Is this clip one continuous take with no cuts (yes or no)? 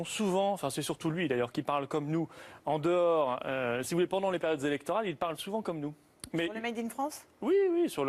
no